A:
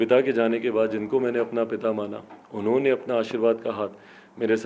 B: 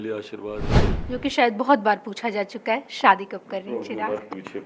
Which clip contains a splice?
B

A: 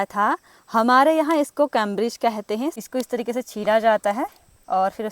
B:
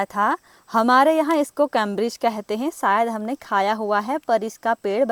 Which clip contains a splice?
A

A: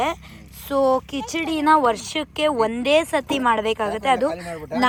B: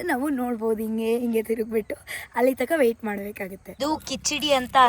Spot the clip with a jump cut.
B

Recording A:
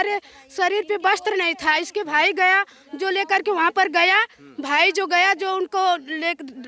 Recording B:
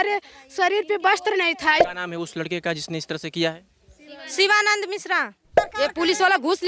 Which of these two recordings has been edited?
B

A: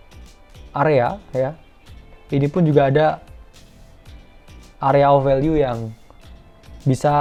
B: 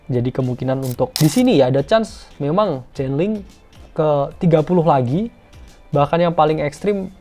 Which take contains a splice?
B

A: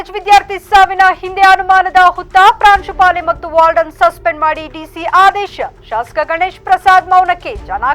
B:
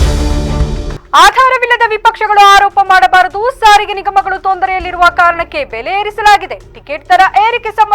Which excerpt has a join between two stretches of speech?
B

